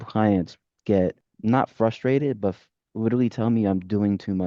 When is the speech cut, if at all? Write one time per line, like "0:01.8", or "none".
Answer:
0:01.3